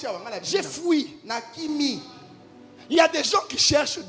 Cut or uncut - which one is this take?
uncut